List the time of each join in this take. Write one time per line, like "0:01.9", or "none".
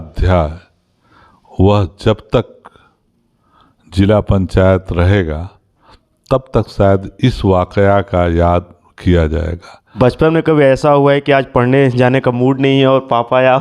0:09.8